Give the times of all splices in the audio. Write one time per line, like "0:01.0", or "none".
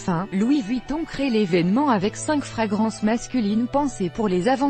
0:03.7